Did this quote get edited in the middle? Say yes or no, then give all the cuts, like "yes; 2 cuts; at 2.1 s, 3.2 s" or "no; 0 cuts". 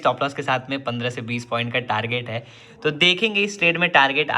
no; 0 cuts